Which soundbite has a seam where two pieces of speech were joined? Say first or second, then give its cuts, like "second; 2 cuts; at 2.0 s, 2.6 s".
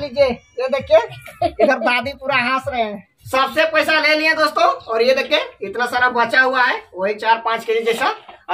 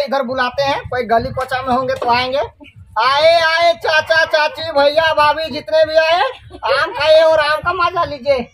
first; 1 cut; at 3.3 s